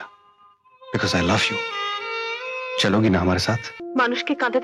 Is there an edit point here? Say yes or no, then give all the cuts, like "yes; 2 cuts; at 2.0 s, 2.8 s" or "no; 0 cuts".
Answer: yes; 1 cut; at 3.7 s